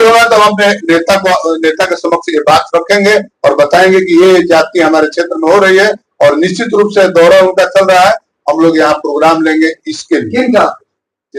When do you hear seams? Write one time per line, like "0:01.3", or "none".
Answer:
none